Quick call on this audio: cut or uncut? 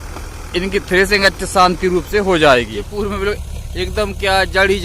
cut